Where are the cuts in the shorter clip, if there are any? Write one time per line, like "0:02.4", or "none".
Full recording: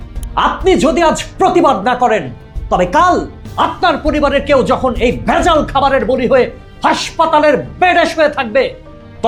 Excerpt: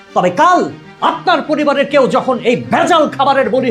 none